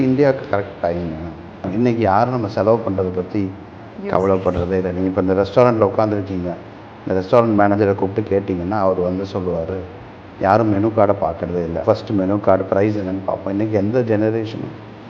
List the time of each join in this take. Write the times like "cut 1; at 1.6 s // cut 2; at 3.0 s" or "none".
cut 1; at 1.7 s // cut 2; at 11.8 s